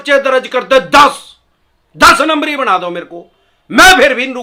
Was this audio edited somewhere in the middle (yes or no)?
no